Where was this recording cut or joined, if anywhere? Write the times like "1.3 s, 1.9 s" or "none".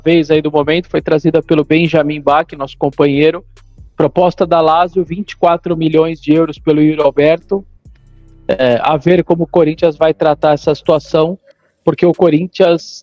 none